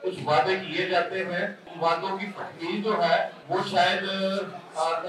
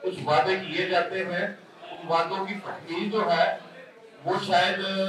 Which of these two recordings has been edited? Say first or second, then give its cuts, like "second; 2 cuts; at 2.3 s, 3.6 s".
first; 2 cuts; at 1.6 s, 3.4 s